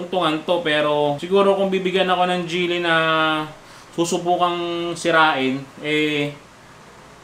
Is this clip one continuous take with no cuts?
no; 1 cut; at 1.2 s

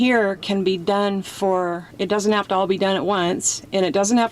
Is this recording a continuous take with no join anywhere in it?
no; 1 cut; at 1.9 s

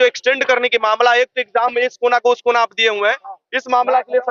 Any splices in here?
no; 0 cuts

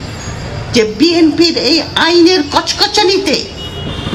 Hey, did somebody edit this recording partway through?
no; 0 cuts

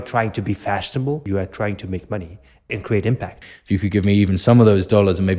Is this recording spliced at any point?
yes; 3 cuts; at 1.2 s, 2.7 s, 3.4 s

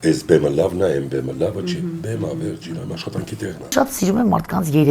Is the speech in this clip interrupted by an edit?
yes; 1 cut; at 3.7 s

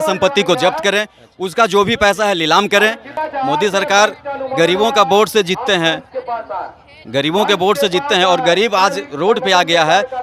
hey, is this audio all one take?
no; 1 cut; at 3.1 s

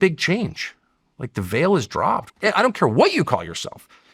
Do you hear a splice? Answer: yes; 1 cut; at 2.3 s

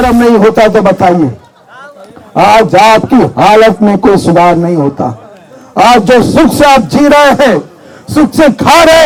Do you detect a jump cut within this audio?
no; 0 cuts

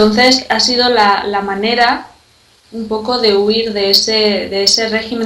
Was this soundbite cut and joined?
yes; 1 cut; at 3.3 s

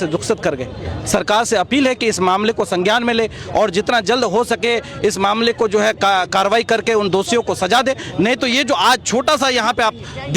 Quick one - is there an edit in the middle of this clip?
no; 0 cuts

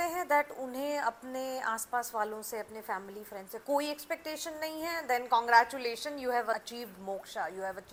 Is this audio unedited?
yes; 0 cuts

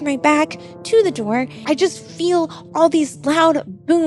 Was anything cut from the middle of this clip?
yes; 1 cut; at 1.5 s

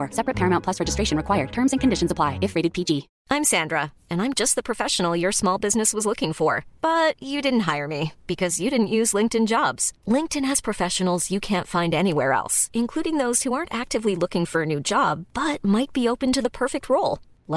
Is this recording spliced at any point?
yes; 1 cut; at 3.1 s

